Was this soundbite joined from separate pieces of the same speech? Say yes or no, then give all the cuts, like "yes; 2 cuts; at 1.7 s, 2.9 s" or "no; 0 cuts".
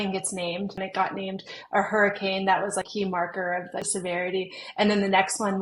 yes; 3 cuts; at 0.8 s, 2.9 s, 3.9 s